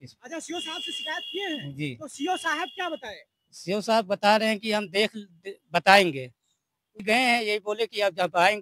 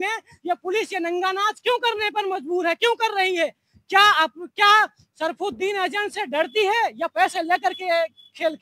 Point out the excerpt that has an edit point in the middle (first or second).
first